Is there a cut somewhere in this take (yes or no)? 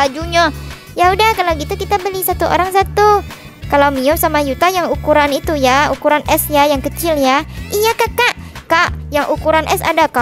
no